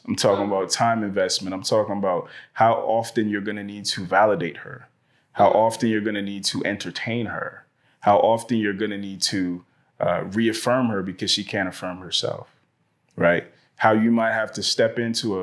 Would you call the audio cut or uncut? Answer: uncut